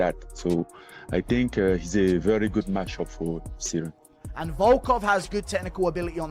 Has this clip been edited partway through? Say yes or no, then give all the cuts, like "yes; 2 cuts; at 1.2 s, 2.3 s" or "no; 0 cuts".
yes; 2 cuts; at 1.2 s, 4.1 s